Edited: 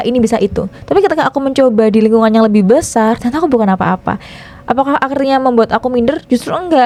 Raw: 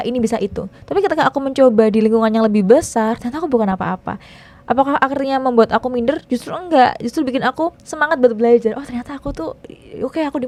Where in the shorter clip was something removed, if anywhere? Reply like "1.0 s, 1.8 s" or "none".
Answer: none

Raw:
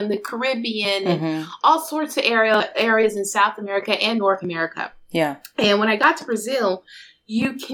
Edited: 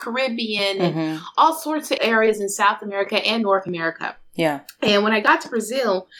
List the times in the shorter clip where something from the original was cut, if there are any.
2.0 s

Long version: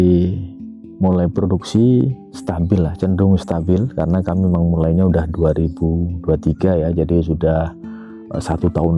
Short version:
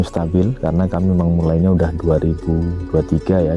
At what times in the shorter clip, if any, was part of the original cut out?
none

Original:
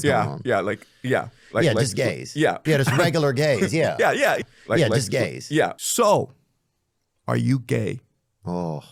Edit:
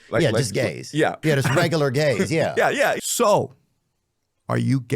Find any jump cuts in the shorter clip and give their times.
3.1 s

